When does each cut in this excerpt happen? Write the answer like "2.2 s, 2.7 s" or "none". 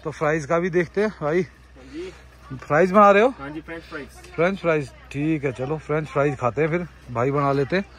none